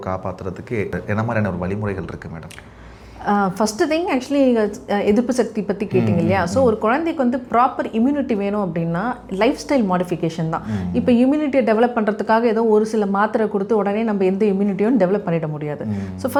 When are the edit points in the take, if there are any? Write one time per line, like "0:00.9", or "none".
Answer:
none